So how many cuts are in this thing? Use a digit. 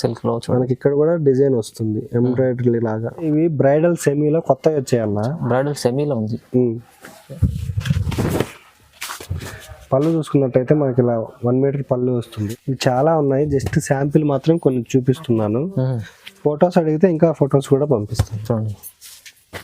2